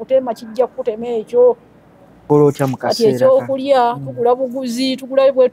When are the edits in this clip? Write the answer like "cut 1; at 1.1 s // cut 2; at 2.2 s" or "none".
cut 1; at 2.2 s